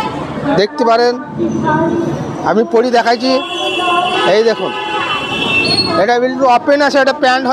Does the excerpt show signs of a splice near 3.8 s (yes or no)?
no